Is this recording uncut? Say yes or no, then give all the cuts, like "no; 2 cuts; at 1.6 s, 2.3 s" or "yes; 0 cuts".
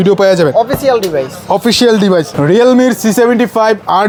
yes; 0 cuts